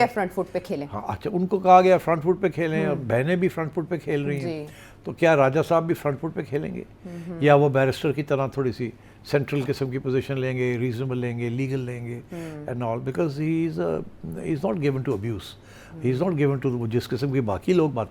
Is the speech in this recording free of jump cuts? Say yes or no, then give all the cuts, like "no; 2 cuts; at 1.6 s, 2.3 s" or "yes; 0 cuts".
yes; 0 cuts